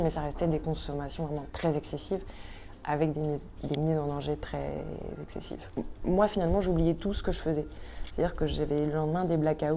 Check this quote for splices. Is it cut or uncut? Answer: cut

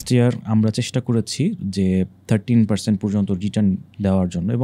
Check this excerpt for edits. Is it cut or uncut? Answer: uncut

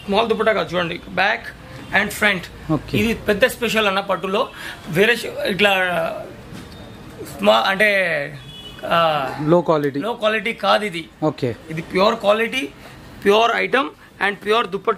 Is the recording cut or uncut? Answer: uncut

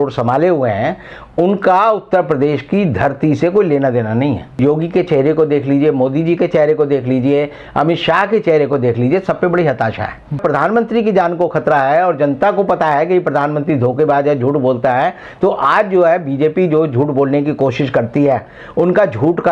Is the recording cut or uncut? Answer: cut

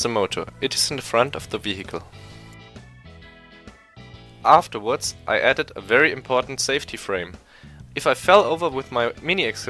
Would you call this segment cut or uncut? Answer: uncut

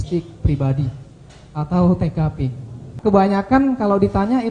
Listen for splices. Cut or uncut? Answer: cut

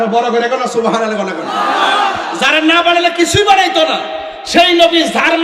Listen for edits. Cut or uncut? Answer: uncut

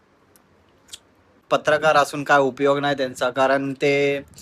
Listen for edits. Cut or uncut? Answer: cut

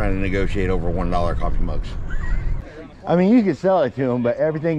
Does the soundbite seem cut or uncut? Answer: cut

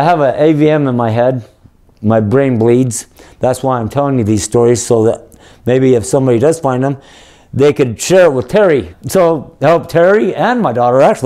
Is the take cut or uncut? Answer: cut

